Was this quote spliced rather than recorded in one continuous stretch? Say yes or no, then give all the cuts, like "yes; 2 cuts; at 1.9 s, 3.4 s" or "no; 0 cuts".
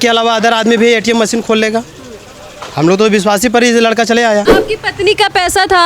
yes; 1 cut; at 4.6 s